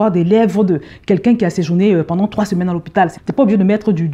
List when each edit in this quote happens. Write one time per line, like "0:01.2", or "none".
none